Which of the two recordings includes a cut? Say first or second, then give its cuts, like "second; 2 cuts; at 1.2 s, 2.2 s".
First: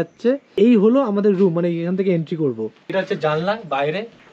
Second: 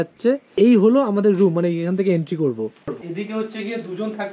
second; 1 cut; at 2.9 s